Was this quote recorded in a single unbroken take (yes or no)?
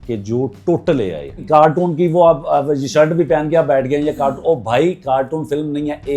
no